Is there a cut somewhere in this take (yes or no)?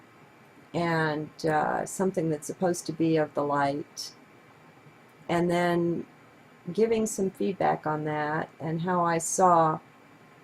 no